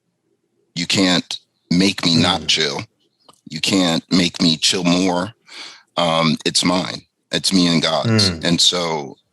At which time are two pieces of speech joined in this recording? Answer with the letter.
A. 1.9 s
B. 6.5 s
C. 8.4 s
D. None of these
D